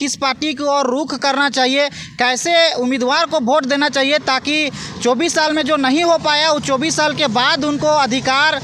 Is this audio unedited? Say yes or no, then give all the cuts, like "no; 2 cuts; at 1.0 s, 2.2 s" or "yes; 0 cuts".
yes; 0 cuts